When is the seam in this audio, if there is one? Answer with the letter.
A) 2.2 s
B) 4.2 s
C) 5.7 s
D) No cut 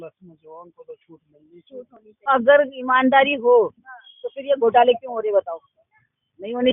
A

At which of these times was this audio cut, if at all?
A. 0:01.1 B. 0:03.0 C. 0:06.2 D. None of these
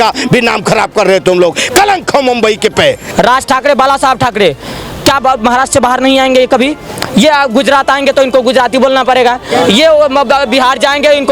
B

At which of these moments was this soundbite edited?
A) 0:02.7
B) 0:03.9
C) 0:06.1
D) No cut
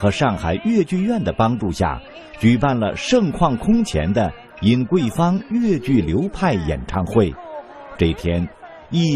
C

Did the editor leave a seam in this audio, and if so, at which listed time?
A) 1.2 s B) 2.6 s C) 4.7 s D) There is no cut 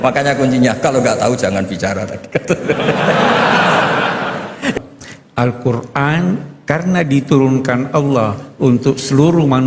C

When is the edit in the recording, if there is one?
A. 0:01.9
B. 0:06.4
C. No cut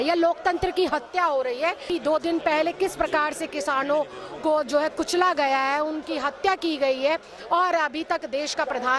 A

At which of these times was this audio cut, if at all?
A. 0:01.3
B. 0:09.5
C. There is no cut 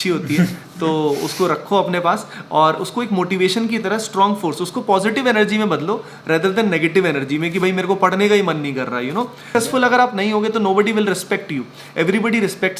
B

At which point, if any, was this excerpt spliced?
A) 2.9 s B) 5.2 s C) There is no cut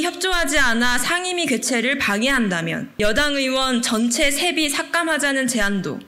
A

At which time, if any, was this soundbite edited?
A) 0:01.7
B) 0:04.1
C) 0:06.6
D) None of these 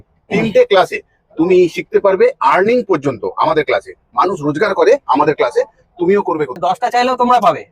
C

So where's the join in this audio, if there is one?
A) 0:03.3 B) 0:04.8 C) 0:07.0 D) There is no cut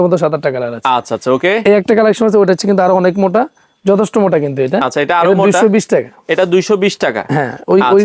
D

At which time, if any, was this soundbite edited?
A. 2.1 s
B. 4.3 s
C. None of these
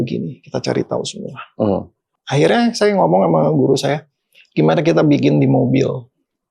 A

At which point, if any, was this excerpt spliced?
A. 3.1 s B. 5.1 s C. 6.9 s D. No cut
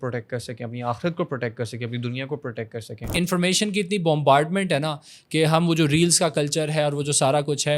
A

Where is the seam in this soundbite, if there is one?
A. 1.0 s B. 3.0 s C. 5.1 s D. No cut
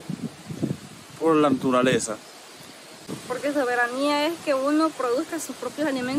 B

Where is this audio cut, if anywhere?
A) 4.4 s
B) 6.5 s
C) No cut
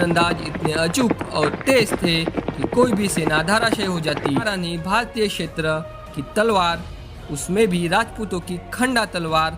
A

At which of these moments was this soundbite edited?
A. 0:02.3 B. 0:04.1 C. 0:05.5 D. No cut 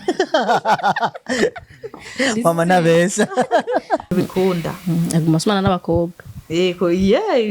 B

